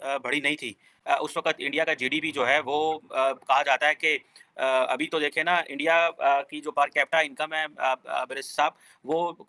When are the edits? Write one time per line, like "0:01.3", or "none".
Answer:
none

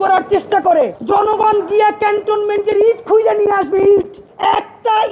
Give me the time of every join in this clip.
0:01.0
0:04.2

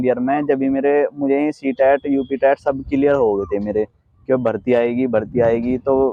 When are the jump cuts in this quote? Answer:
none

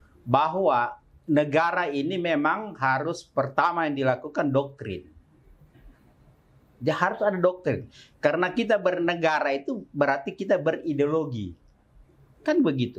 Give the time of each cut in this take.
none

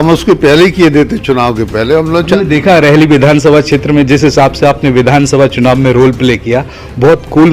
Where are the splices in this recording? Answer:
0:02.3

